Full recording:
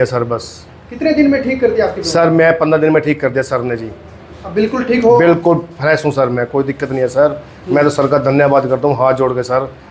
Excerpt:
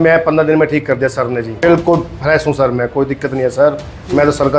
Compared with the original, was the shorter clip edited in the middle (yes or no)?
yes